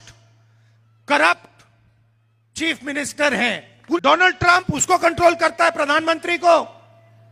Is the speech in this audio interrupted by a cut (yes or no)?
yes